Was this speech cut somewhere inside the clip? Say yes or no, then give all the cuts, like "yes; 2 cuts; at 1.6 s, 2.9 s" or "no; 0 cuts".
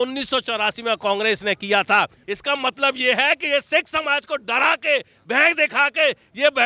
yes; 1 cut; at 2.2 s